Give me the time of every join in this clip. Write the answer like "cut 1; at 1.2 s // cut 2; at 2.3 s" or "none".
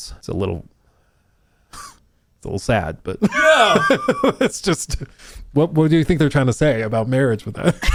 none